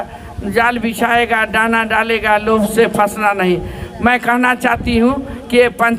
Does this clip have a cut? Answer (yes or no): no